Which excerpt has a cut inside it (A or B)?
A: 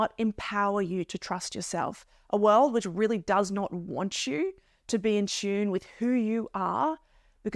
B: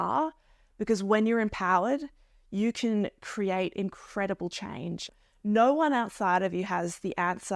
B